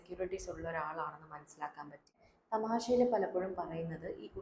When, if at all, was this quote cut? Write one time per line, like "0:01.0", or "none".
0:02.3